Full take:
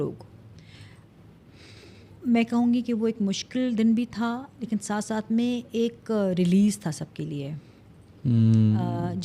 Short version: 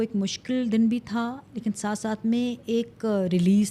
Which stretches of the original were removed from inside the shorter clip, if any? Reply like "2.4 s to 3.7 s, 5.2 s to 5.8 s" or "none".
none

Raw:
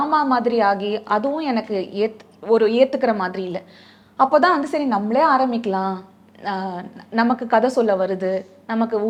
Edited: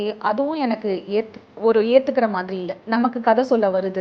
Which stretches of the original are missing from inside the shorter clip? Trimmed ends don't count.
3.7 s to 7.1 s

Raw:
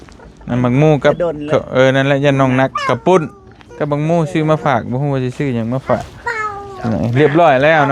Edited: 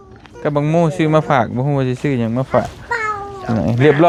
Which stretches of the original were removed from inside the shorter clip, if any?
none

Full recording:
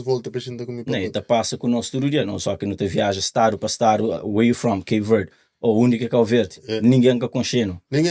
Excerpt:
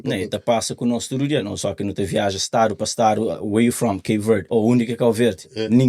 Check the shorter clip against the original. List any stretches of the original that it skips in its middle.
5.3 s to 5.6 s

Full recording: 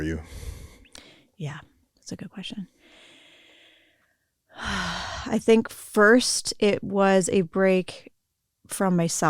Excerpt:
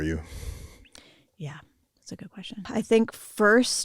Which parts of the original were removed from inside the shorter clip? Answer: 2.7 s to 5.2 s

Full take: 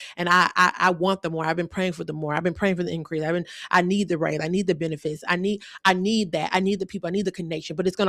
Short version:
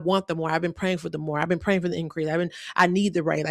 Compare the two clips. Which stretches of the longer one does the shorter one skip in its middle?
none

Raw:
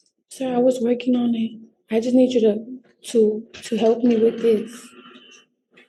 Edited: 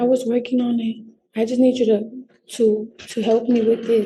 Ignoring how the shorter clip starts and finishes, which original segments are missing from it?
none

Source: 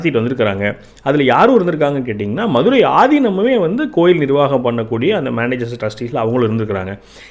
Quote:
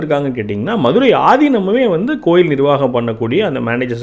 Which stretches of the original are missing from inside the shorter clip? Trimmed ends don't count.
none

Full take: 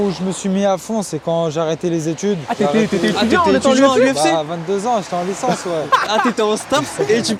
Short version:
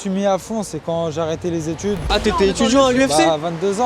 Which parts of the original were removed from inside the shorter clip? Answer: 2.5 s to 3.1 s

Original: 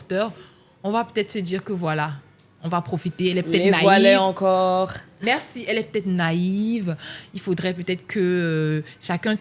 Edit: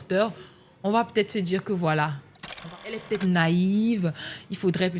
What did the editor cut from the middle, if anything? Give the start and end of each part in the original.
2.6 s to 5.5 s

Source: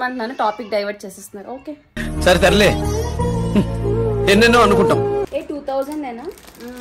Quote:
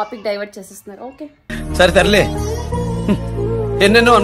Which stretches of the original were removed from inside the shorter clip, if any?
none

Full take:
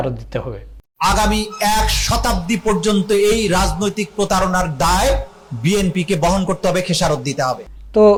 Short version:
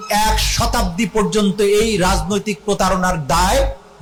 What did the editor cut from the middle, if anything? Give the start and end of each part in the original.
none

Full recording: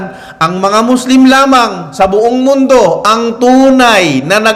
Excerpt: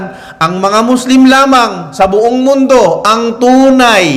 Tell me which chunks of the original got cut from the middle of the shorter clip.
none

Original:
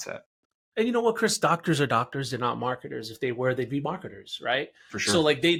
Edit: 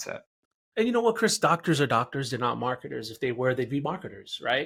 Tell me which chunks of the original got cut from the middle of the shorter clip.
none

